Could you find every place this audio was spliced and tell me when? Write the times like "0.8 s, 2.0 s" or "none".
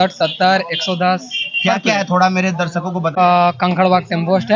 3.1 s